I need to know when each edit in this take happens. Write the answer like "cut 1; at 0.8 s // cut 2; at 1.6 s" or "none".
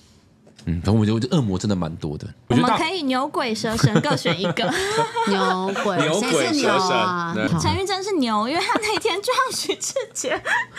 cut 1; at 2.5 s // cut 2; at 7.5 s